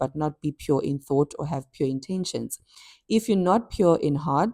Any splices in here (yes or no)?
no